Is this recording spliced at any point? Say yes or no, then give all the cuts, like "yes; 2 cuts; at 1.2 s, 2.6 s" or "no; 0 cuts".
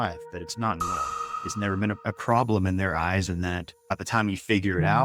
yes; 2 cuts; at 1.3 s, 3.7 s